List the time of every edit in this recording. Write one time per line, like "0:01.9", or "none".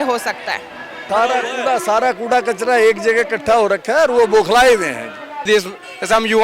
0:00.9
0:05.4

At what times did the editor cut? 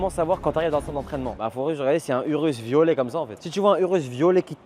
0:00.9
0:03.4

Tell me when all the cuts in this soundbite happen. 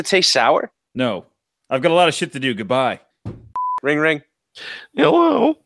0:03.8

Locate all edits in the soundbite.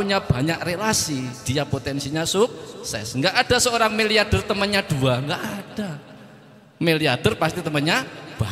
none

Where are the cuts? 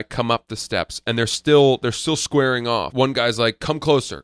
0:02.9

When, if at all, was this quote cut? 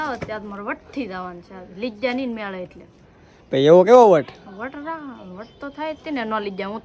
none

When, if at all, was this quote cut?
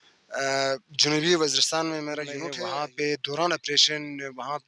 0:02.4

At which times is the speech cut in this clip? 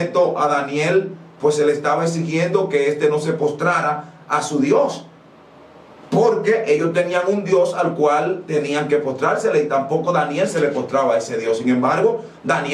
none

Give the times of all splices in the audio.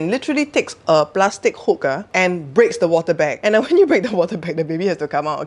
none

